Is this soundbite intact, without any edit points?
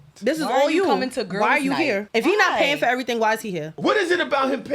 no; 2 cuts; at 2.1 s, 3.7 s

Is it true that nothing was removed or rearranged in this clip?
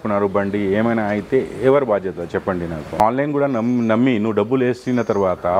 no; 1 cut; at 3.0 s

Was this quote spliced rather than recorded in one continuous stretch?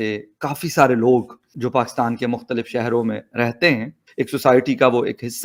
no; 0 cuts

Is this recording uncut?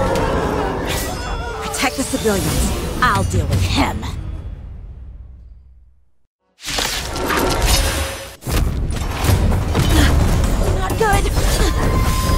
no; 1 cut; at 8.3 s

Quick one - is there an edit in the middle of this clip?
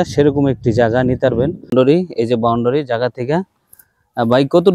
yes; 1 cut; at 1.7 s

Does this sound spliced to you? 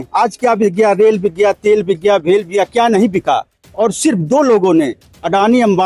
no; 0 cuts

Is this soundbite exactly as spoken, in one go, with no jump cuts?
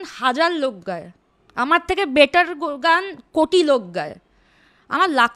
yes; 0 cuts

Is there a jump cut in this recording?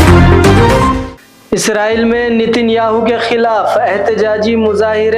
yes; 1 cut; at 1.1 s

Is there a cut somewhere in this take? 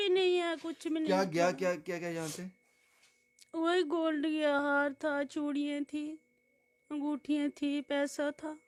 no; 0 cuts

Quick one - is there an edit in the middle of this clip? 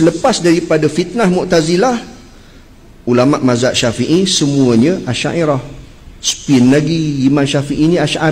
no; 0 cuts

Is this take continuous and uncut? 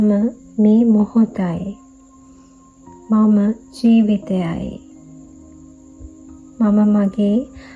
yes; 0 cuts

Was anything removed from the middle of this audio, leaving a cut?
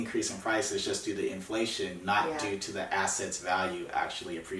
no; 0 cuts

